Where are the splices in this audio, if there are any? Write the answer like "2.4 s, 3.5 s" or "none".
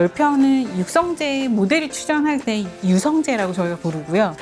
none